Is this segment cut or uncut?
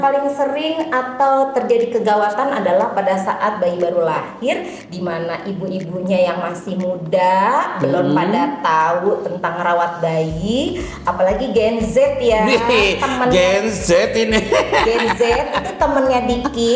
uncut